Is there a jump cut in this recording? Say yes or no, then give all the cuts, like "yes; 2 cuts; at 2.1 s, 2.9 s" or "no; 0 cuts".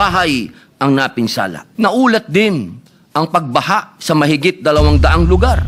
yes; 1 cut; at 1.6 s